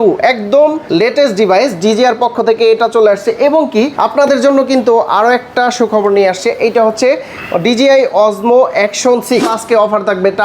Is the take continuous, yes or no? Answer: no